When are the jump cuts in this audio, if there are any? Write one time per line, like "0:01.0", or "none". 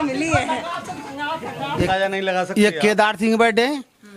0:01.8